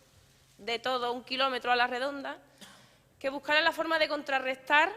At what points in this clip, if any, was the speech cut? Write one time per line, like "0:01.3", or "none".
0:01.0